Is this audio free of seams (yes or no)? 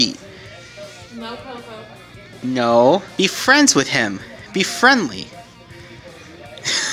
yes